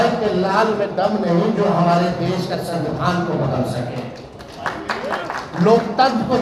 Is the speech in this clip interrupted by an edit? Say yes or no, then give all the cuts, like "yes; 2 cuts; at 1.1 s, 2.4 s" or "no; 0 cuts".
no; 0 cuts